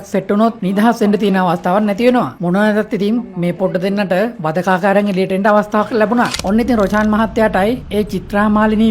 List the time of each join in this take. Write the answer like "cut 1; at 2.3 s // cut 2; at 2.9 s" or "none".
cut 1; at 6.4 s